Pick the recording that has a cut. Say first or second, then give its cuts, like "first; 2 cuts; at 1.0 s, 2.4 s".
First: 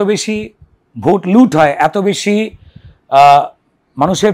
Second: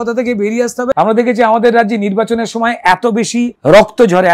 second; 2 cuts; at 0.9 s, 3.6 s